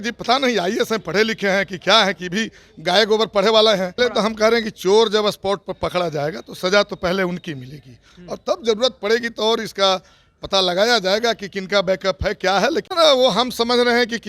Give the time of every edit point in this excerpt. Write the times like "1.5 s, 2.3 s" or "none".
4.0 s, 12.9 s